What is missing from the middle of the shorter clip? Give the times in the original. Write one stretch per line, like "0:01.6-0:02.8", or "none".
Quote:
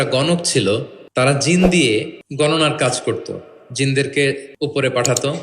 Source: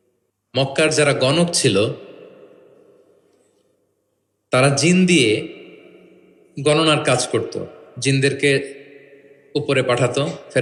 0:02.1-0:04.3
0:05.5-0:06.4
0:08.7-0:09.4